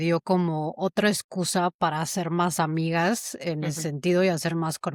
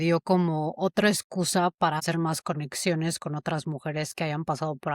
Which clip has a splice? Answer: second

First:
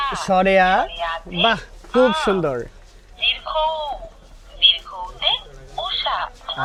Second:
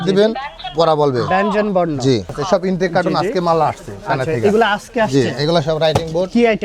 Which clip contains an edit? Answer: second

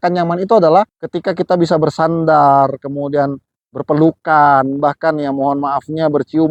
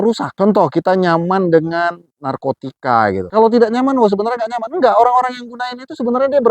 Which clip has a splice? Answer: second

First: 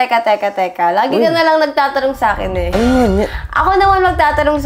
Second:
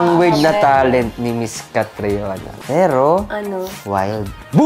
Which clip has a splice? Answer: second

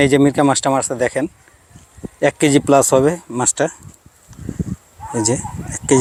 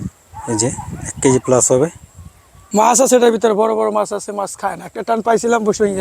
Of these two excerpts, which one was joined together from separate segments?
second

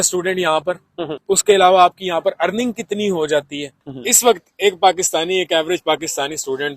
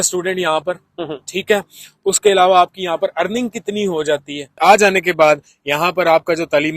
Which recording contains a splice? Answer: first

